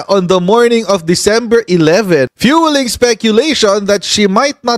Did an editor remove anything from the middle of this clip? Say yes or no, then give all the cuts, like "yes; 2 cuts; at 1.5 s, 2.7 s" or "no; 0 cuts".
yes; 1 cut; at 2.3 s